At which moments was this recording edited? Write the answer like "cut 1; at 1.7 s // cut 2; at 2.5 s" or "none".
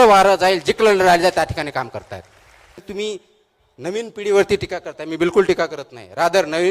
cut 1; at 2.8 s